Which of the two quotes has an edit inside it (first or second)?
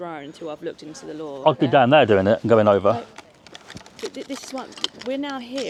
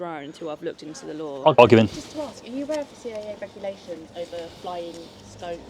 second